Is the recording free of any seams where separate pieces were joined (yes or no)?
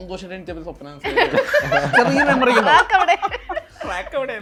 yes